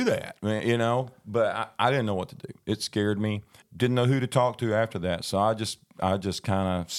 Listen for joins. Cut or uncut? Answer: cut